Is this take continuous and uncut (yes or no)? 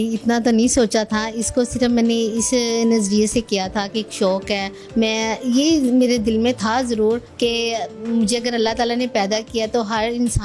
yes